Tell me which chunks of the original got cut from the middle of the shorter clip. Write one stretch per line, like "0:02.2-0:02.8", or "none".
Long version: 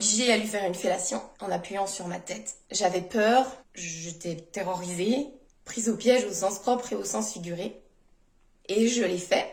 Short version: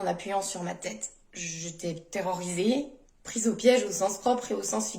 0:02.6-0:03.6